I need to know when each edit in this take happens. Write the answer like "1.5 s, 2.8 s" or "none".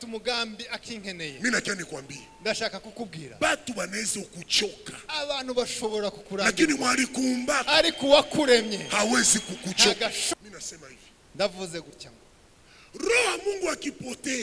10.3 s